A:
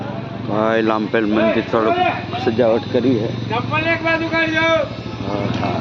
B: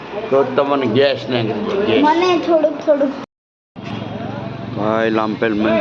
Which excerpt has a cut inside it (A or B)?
B